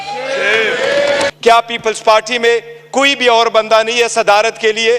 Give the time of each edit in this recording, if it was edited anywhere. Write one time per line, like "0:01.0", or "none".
0:01.3